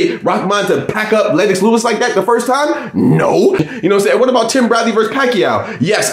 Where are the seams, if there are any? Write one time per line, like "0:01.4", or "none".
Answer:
0:03.6